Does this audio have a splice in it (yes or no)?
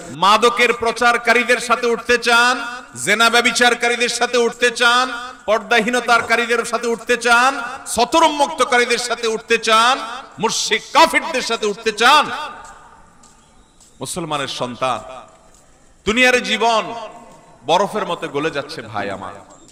no